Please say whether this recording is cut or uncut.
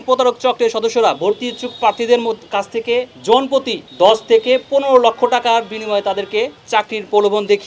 cut